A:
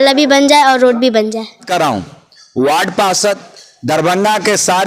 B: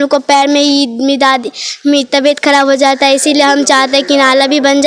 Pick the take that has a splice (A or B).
A